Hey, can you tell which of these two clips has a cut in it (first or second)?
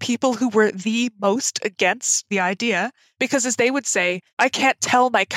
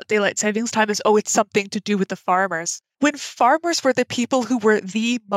first